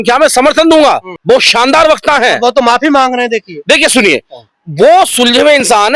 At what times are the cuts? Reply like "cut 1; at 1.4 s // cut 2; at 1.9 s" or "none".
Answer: none